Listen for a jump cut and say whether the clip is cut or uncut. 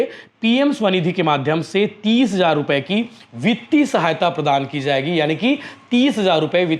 uncut